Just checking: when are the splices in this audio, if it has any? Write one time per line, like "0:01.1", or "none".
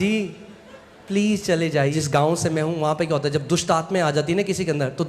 0:02.0